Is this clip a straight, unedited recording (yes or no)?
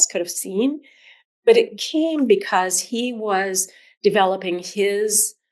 yes